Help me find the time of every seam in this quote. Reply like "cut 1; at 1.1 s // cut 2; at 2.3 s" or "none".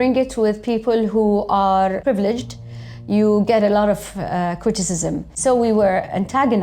cut 1; at 5.3 s